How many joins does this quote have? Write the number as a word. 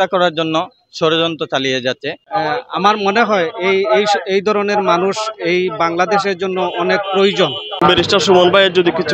two